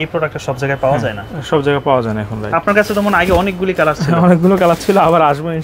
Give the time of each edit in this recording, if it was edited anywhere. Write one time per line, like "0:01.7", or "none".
none

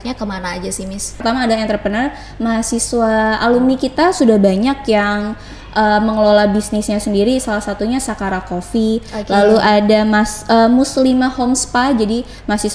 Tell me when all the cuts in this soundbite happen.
0:01.2

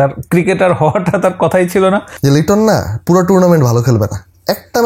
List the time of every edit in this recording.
0:02.1

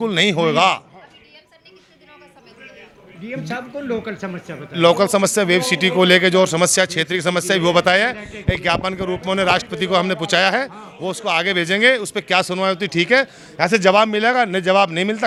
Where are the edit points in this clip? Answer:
none

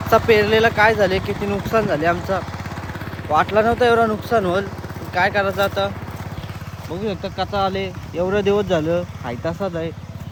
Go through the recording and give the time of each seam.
none

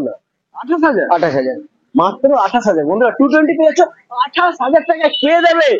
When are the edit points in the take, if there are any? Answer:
none

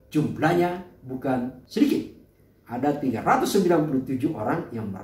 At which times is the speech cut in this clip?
0:01.6

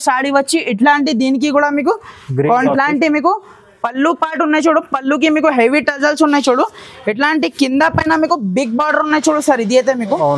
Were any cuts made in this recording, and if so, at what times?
0:02.7

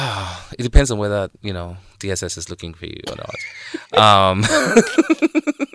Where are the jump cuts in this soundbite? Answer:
none

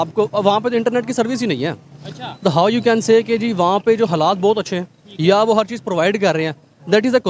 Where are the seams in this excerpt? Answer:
none

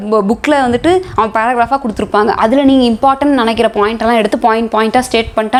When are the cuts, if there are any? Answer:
none

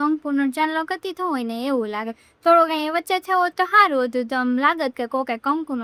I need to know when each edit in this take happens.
none

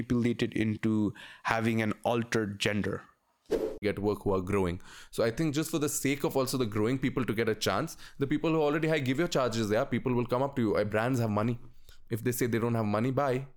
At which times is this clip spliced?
0:03.8

